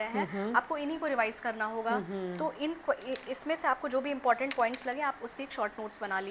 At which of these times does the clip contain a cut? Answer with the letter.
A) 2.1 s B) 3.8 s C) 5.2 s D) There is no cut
D